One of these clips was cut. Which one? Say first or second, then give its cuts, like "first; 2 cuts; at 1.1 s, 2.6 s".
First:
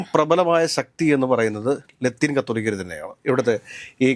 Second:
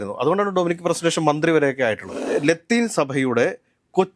second; 1 cut; at 2.2 s